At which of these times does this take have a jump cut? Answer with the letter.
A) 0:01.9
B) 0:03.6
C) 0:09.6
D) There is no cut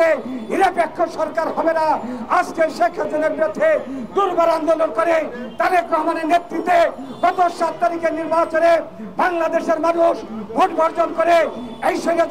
D